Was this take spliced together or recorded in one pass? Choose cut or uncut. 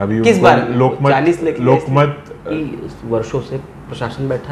cut